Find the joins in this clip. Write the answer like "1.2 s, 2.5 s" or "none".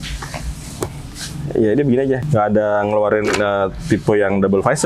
2.2 s